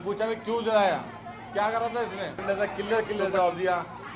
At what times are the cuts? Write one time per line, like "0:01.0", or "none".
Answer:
0:02.4

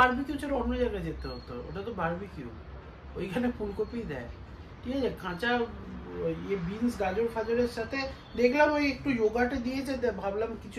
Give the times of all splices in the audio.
none

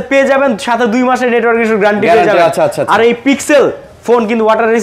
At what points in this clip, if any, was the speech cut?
none

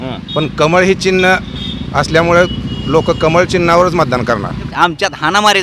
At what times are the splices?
0:04.7

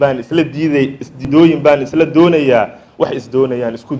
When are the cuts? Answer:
0:01.1

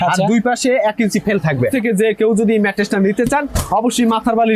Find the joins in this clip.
0:01.7

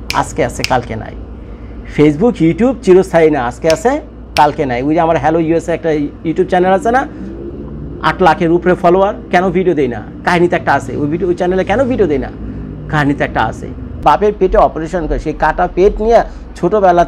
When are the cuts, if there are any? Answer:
0:14.0

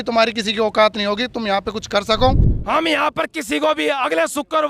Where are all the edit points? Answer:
0:02.5

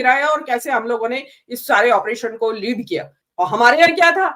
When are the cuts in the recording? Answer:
0:03.2

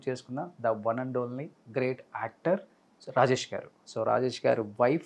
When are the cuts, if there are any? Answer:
0:03.9

